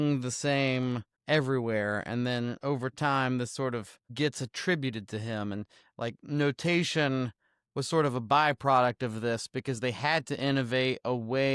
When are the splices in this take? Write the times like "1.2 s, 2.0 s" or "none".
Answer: 1.1 s, 4.0 s